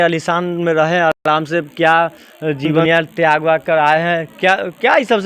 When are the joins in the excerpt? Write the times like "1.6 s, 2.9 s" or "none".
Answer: none

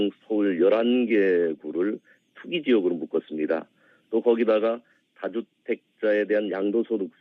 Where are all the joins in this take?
2.8 s

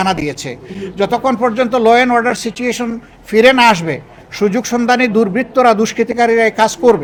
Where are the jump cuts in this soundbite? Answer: none

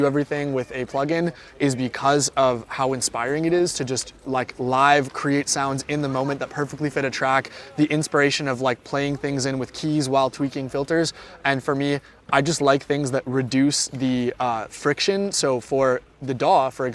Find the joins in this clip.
none

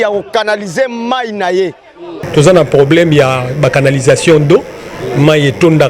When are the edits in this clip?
2.1 s

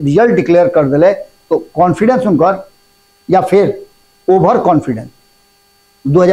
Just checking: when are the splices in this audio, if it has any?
none

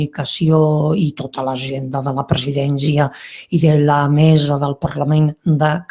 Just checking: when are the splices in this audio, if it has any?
2.7 s

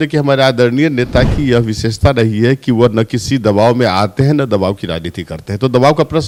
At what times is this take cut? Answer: none

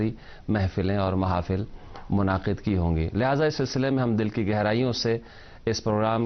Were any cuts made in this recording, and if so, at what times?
1.4 s

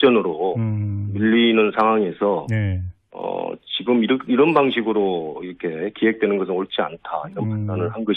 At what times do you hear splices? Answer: 5.6 s

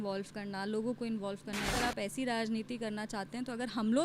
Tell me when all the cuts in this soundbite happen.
1.7 s

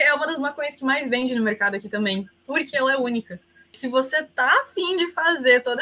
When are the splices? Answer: 3.8 s

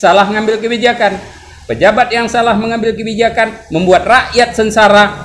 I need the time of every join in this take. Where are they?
none

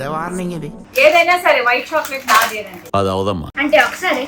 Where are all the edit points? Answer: 3.0 s

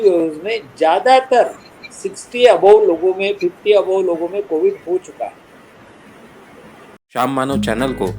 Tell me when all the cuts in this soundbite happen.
7.2 s

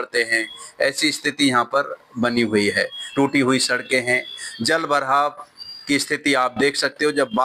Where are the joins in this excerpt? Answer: 2.9 s

